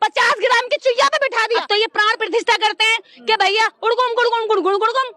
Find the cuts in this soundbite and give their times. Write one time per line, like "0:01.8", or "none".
0:01.6